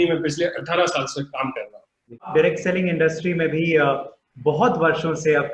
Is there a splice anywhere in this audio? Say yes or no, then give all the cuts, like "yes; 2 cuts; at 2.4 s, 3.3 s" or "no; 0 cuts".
yes; 1 cut; at 2.3 s